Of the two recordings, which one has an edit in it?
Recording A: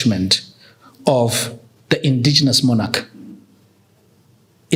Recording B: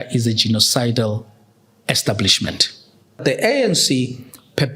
B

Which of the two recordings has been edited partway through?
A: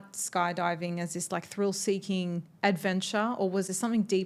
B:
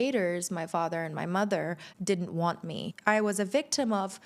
B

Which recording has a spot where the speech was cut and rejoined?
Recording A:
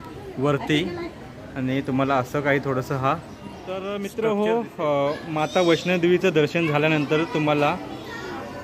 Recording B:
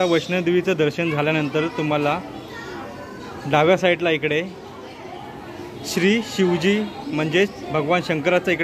A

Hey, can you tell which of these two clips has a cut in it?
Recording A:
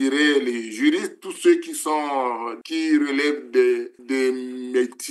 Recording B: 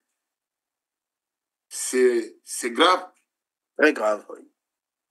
A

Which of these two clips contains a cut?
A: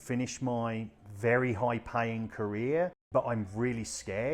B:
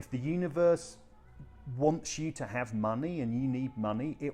A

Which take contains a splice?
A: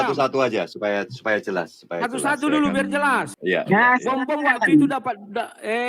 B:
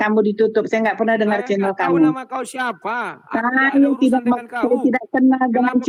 A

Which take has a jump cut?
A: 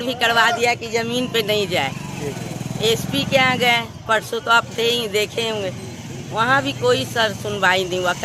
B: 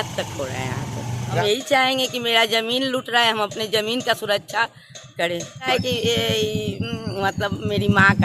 B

